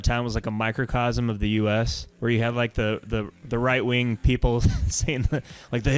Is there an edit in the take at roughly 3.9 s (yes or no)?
no